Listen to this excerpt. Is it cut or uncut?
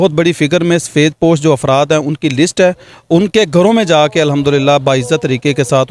uncut